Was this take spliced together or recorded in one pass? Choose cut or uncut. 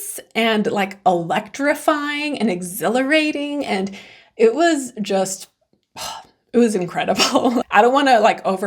cut